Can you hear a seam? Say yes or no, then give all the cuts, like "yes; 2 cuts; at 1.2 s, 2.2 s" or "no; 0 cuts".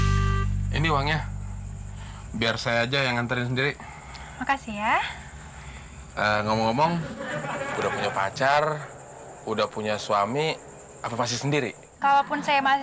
no; 0 cuts